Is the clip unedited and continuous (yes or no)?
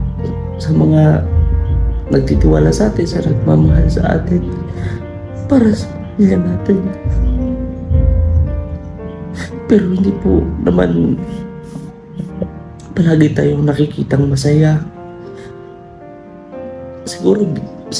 no